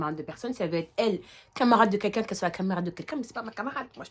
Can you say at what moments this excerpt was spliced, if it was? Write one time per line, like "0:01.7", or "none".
none